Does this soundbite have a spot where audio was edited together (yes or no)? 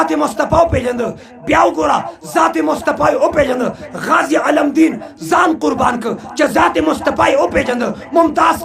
no